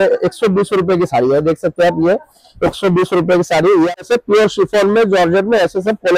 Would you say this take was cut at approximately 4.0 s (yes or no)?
yes